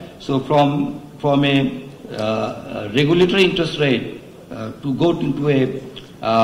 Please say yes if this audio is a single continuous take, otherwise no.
yes